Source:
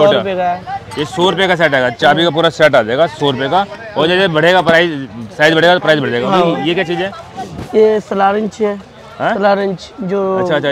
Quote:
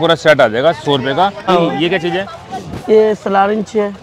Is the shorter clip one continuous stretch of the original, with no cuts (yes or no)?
no